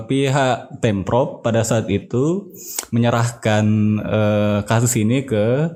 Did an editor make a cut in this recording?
no; 0 cuts

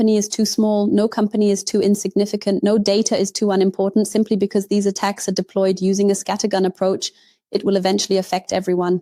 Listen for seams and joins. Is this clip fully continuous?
yes; 0 cuts

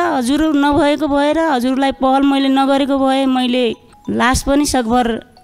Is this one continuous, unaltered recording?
yes; 0 cuts

